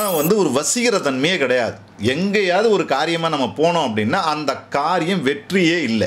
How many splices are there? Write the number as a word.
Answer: zero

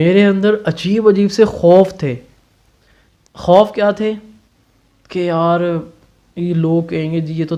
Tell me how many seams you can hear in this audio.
zero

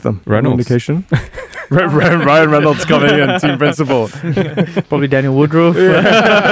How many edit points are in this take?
zero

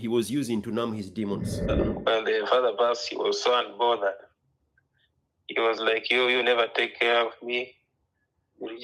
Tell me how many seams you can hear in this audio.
one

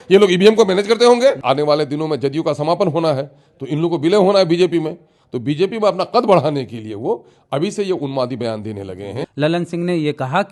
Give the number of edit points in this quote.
two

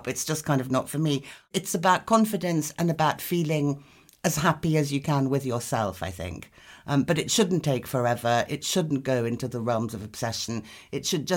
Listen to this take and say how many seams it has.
one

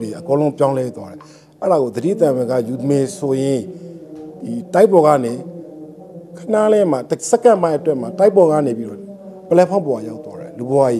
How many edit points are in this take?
zero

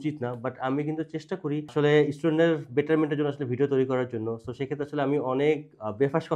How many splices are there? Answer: zero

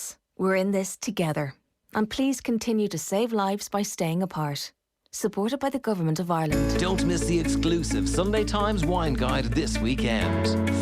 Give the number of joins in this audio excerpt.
one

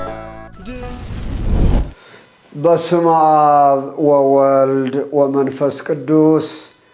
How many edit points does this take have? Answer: two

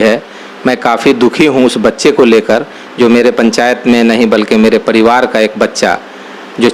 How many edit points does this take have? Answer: zero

